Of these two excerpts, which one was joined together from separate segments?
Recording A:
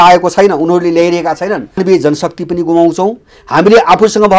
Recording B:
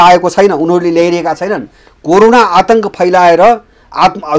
A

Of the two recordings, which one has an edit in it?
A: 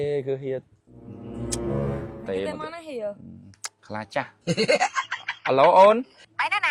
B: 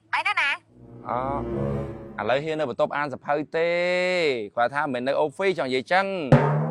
B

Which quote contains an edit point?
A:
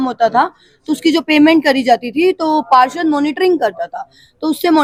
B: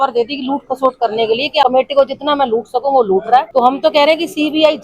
B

